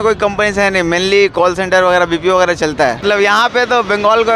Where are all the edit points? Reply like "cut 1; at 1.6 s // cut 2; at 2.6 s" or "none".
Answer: cut 1; at 3.0 s